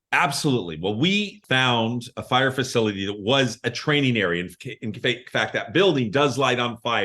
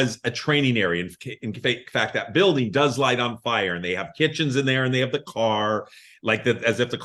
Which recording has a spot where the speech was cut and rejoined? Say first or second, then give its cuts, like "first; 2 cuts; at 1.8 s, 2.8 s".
first; 1 cut; at 1.4 s